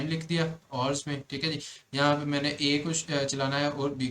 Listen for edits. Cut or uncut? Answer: uncut